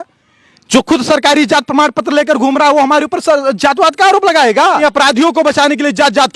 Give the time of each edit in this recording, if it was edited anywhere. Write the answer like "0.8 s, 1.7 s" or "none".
4.8 s